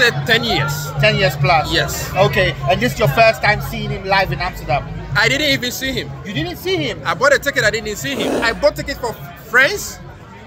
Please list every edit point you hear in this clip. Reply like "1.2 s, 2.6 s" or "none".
8.4 s